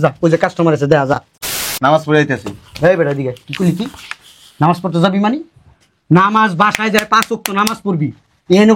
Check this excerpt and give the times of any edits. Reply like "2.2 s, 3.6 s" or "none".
1.6 s